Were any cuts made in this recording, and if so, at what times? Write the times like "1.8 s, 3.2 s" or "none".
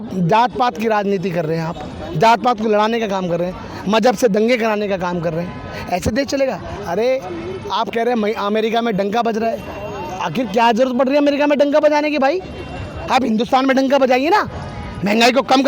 none